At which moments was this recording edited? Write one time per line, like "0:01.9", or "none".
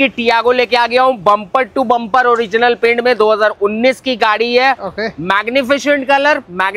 none